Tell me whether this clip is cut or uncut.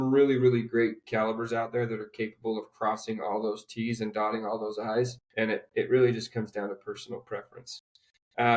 cut